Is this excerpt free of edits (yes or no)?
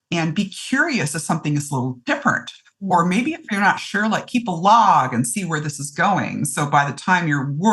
yes